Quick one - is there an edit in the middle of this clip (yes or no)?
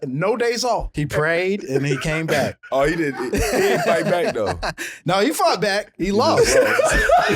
yes